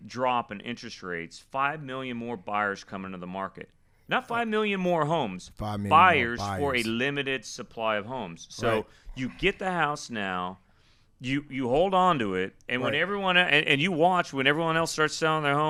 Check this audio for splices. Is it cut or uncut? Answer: uncut